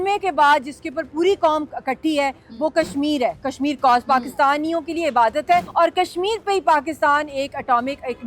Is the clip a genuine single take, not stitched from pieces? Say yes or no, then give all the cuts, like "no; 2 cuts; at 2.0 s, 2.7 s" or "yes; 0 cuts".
no; 1 cut; at 5.7 s